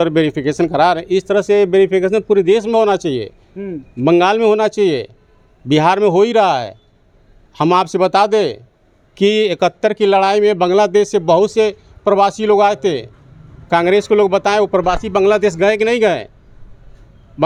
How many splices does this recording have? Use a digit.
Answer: 0